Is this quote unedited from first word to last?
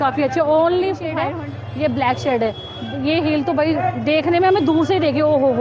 no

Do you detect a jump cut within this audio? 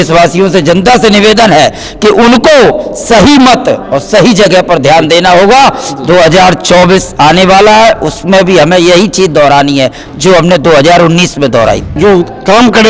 yes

